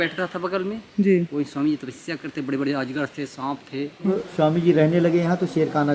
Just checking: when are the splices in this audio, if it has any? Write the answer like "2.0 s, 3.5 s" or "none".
4.0 s